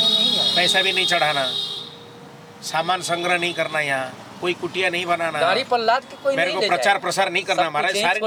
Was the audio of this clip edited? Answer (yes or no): no